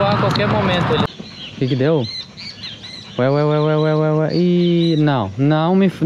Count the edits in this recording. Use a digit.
1